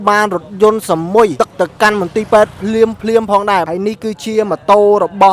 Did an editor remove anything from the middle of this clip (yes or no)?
yes